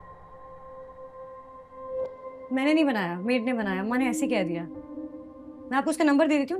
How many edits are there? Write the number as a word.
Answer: zero